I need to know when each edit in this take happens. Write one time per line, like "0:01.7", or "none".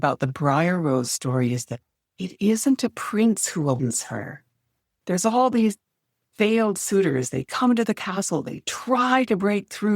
0:04.9